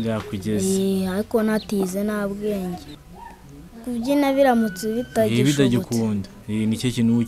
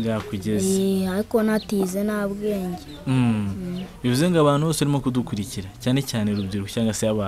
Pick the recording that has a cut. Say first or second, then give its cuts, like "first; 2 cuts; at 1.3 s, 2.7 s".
first; 1 cut; at 2.9 s